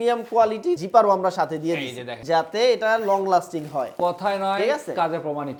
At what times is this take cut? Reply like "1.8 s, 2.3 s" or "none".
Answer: none